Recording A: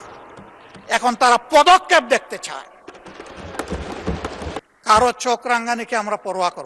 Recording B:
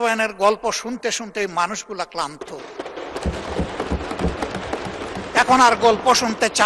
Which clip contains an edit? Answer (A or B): A